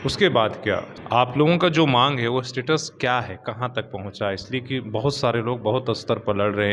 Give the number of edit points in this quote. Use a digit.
1